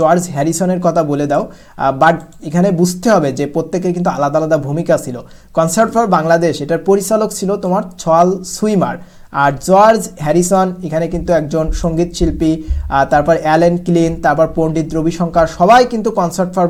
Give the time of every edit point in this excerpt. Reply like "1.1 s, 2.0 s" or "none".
none